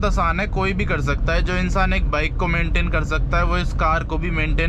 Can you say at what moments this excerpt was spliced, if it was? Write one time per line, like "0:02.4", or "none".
none